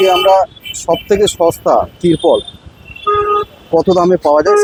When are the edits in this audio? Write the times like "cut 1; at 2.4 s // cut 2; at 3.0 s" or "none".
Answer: none

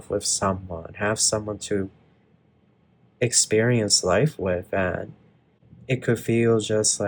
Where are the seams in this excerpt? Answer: none

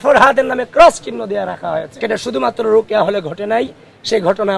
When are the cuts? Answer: cut 1; at 1.9 s

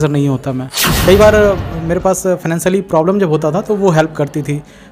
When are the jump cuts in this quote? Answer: cut 1; at 0.9 s

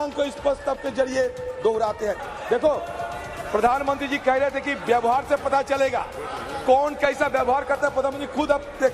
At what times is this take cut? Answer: cut 1; at 2.3 s

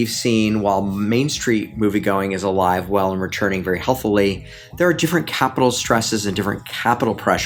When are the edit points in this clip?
none

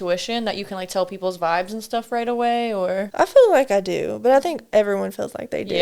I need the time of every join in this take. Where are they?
cut 1; at 3.1 s

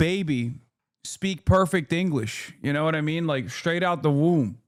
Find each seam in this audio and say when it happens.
none

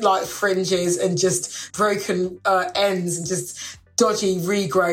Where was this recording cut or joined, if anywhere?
cut 1; at 1.6 s

